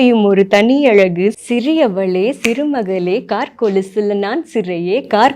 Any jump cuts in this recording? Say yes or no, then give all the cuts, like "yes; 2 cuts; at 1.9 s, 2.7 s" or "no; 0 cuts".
yes; 1 cut; at 1.3 s